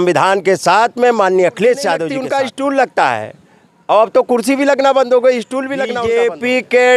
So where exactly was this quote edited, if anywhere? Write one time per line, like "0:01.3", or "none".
0:02.1
0:05.8